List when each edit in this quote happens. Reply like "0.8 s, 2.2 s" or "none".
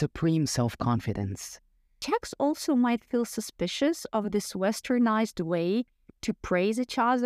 1.9 s